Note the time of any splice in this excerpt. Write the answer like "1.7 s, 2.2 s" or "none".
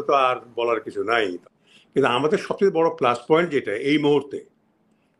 1.5 s